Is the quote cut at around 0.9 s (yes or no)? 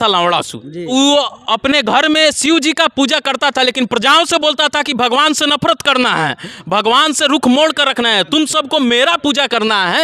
yes